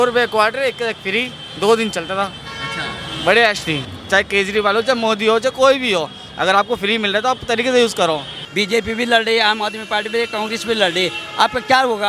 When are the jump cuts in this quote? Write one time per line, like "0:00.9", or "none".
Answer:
0:03.9
0:08.4